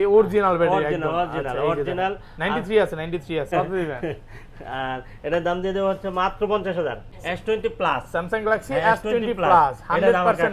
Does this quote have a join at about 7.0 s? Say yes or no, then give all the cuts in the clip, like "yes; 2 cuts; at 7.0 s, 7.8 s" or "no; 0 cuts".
yes; 2 cuts; at 3.5 s, 7.0 s